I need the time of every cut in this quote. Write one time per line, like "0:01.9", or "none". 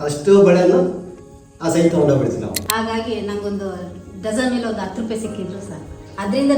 0:02.5